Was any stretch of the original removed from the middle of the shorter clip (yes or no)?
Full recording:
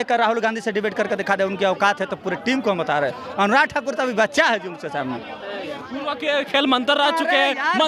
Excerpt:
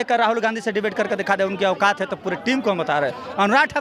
no